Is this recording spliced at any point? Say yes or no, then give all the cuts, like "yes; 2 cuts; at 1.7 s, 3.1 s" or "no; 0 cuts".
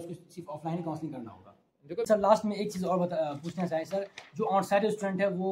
yes; 1 cut; at 2.1 s